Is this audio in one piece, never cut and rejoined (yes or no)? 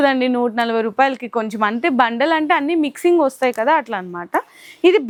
yes